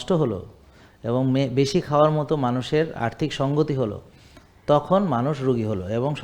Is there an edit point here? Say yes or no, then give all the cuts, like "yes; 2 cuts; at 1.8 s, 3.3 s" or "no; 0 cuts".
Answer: no; 0 cuts